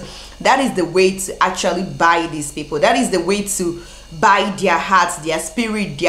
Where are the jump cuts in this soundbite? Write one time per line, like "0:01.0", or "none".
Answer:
none